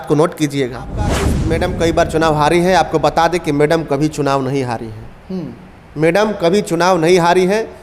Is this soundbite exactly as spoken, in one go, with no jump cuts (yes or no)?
no